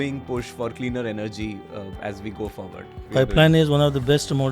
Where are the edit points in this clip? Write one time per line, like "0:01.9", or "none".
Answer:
0:00.8
0:03.0